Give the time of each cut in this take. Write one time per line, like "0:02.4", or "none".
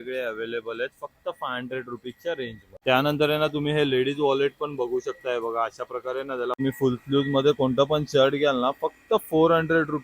0:02.6
0:06.6